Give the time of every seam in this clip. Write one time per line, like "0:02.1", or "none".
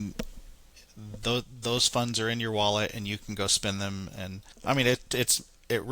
0:04.4